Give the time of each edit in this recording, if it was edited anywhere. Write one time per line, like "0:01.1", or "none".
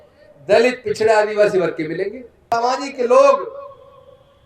0:02.5